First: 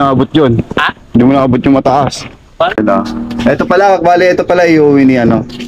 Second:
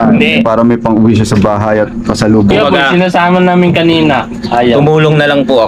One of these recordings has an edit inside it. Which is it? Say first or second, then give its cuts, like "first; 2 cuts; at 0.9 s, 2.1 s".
first; 1 cut; at 2.8 s